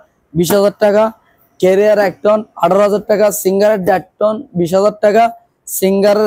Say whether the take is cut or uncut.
uncut